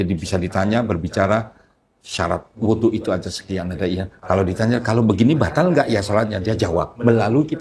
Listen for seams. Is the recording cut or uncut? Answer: uncut